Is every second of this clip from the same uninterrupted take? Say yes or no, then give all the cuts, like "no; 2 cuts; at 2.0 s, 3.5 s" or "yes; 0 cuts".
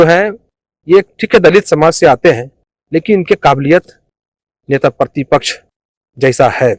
yes; 0 cuts